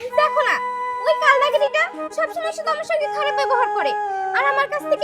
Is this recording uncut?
yes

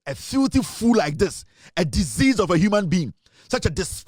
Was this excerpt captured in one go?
yes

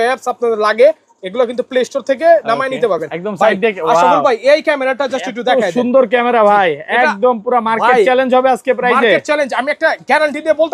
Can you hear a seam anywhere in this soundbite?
no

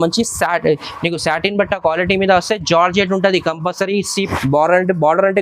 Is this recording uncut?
no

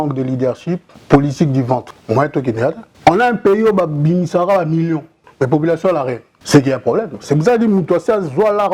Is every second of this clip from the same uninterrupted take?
no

